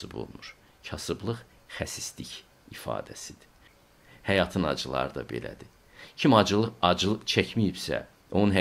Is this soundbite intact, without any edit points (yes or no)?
no